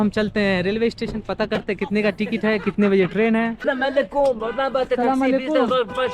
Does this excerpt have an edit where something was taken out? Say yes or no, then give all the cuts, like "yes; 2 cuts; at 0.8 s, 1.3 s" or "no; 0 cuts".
no; 0 cuts